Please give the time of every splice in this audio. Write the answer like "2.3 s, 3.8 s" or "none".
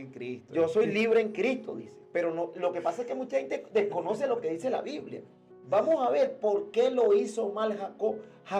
none